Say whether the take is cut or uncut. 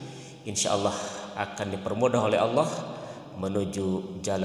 uncut